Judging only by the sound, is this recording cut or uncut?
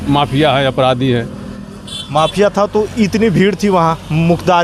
uncut